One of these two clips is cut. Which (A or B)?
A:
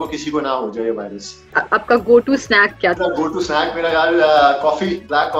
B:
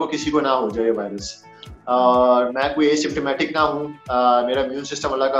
A